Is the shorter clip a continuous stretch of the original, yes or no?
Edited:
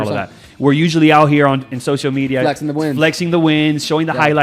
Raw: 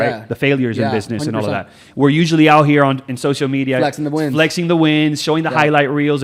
yes